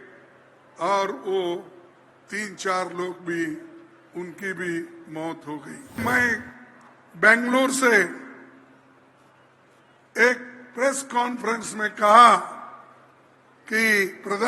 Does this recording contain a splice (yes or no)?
yes